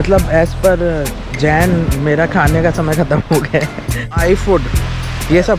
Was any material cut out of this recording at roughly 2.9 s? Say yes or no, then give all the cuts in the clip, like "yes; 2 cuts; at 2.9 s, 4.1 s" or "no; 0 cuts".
no; 1 cut; at 4.1 s